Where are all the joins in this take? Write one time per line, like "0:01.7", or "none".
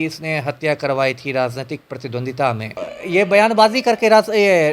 0:02.9